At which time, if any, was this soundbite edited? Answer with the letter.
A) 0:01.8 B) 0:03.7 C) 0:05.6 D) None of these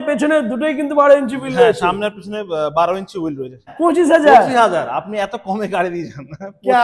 B